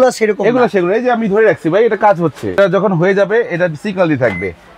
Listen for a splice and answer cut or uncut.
cut